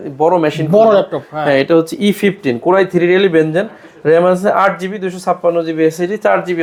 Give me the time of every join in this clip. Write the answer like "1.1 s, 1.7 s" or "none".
none